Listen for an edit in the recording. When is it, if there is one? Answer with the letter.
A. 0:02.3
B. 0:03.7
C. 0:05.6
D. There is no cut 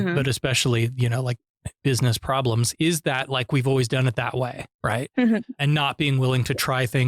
C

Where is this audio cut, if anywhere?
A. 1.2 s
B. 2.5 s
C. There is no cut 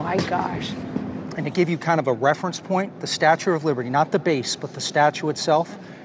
A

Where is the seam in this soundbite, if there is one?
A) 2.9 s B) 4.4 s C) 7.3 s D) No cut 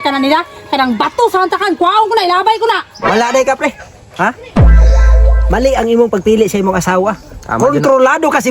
A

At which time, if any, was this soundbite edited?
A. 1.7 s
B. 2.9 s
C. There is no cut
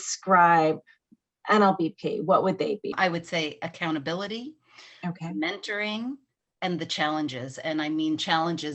B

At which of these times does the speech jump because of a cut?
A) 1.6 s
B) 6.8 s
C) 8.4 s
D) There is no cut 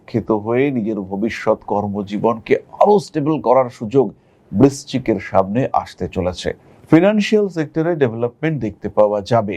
B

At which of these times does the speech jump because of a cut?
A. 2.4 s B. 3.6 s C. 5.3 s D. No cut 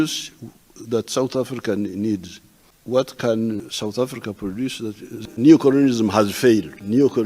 C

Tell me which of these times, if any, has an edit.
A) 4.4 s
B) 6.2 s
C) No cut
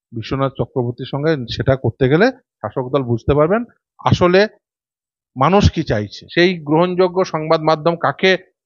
B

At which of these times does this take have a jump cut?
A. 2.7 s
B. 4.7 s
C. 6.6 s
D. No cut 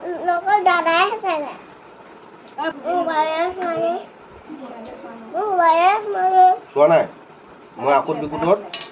A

